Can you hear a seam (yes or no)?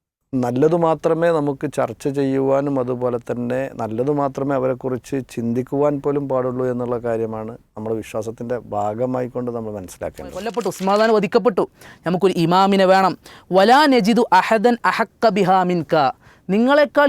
yes